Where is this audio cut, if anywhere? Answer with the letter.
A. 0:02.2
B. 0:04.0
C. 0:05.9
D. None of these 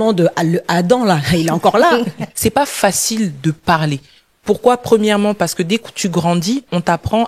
A